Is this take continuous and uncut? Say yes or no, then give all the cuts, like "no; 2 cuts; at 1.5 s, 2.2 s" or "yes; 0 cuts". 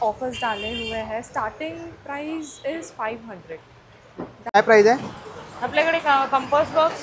no; 1 cut; at 4.6 s